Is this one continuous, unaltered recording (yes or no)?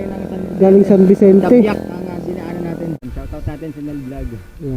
no